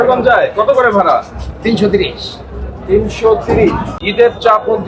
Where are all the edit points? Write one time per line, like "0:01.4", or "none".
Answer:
0:03.9